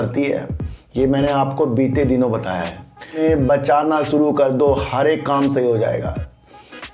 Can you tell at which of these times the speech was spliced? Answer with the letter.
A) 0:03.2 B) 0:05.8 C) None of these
A